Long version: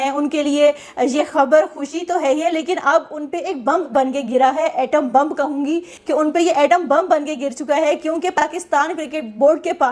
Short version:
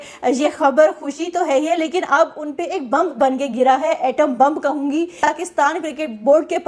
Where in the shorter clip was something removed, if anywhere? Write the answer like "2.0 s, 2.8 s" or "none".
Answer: 5.2 s